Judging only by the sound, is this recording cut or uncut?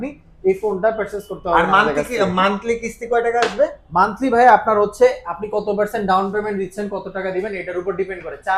uncut